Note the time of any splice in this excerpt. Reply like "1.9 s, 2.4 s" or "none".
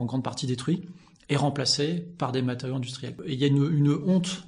3.2 s